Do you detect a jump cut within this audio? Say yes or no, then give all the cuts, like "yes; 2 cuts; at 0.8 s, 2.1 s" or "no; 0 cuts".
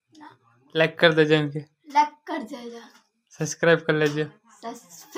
no; 0 cuts